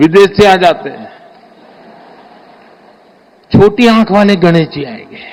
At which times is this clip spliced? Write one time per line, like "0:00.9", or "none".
none